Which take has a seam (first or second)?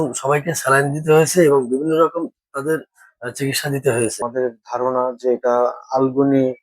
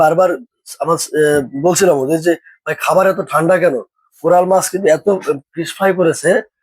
first